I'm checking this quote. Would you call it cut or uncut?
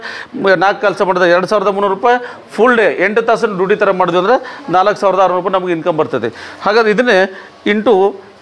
uncut